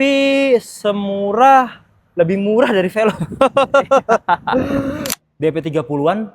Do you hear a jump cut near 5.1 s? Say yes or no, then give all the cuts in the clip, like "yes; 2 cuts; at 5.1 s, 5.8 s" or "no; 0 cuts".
yes; 1 cut; at 5.1 s